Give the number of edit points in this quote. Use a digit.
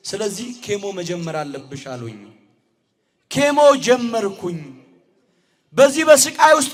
0